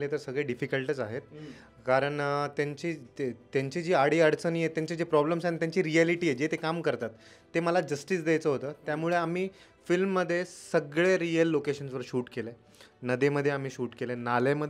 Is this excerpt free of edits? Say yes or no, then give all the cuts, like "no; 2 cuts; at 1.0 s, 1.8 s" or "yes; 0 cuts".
yes; 0 cuts